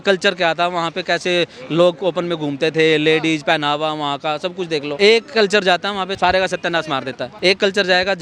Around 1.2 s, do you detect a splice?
no; 3 cuts; at 4.9 s, 6.1 s, 7.3 s

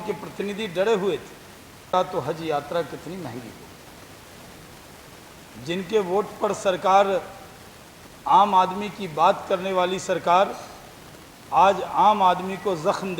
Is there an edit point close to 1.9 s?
yes; 1 cut; at 1.9 s

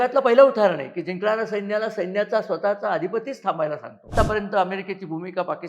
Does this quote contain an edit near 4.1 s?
yes; 1 cut; at 4.1 s

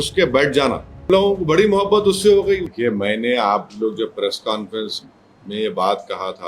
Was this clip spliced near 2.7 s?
yes; 2 cuts; at 1.1 s, 2.7 s

